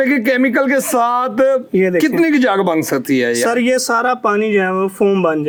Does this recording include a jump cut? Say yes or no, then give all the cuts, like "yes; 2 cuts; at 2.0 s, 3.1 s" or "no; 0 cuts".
no; 0 cuts